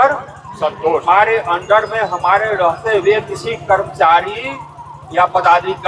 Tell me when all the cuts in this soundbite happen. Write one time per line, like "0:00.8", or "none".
0:01.0